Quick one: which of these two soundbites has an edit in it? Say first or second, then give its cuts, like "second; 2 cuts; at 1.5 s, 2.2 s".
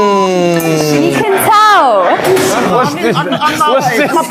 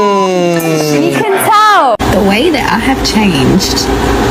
second; 1 cut; at 2.0 s